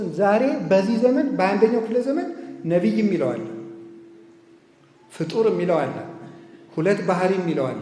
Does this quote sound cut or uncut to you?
uncut